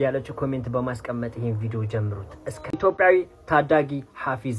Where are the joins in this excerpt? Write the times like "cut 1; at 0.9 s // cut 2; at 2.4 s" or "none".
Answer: cut 1; at 2.7 s